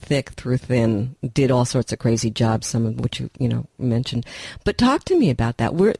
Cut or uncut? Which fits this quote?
uncut